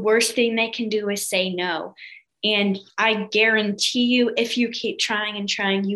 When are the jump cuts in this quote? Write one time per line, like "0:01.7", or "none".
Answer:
none

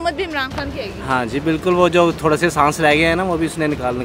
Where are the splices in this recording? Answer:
none

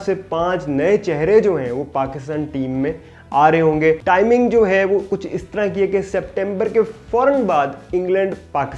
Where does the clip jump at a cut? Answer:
0:04.0

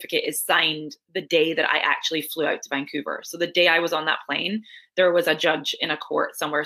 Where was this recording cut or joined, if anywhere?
none

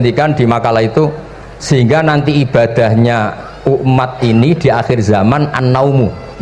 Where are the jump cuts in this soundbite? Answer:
none

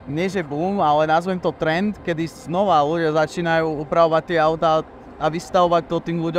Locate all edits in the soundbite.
none

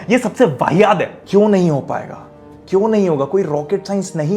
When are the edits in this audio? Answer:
0:01.2

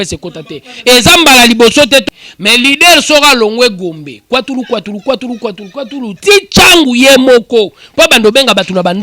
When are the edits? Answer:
0:02.0

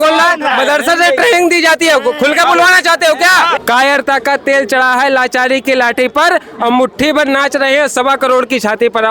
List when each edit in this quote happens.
0:03.6

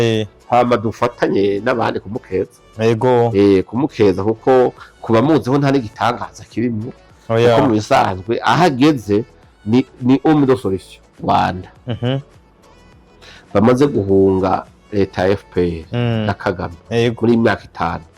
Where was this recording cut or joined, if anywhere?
0:11.2

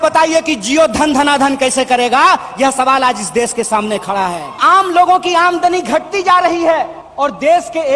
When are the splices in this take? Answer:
0:04.6
0:07.0

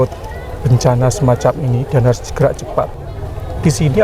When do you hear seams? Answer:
0:02.9

